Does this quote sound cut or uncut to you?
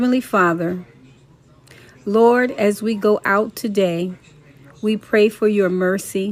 uncut